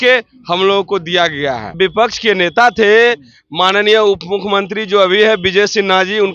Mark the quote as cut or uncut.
cut